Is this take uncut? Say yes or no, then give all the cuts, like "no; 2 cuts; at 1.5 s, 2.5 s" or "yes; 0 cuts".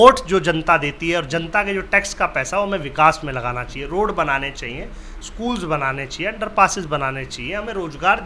yes; 0 cuts